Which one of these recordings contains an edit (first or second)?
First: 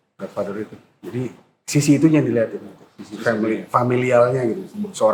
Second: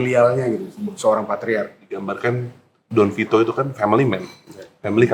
second